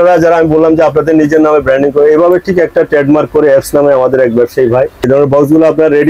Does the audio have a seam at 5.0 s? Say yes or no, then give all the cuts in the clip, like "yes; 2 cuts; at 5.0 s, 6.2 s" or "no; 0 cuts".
yes; 1 cut; at 5.0 s